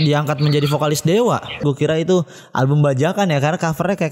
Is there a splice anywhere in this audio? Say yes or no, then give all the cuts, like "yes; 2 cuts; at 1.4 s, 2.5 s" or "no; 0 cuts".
yes; 1 cut; at 1.6 s